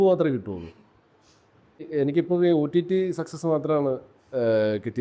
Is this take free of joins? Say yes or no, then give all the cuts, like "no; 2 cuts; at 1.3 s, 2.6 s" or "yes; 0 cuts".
no; 1 cut; at 1.8 s